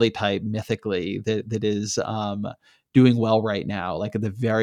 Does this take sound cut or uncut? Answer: uncut